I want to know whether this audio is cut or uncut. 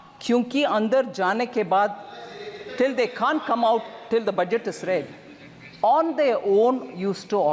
uncut